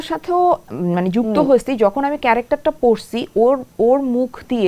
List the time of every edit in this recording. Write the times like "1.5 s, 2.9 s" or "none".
none